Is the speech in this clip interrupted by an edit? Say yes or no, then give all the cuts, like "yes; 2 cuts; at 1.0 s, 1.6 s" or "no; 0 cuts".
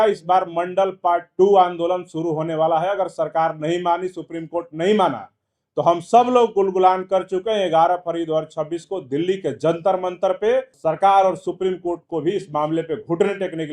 yes; 1 cut; at 10.7 s